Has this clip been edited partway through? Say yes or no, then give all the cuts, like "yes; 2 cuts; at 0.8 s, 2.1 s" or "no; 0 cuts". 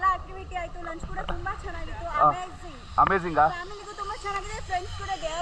no; 0 cuts